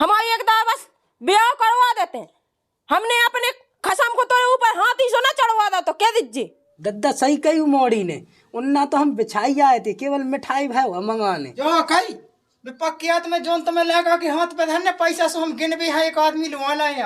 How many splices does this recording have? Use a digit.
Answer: 2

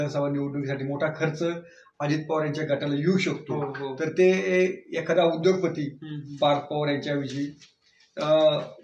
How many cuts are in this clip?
0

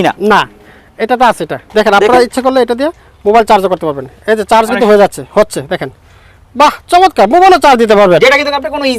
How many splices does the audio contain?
1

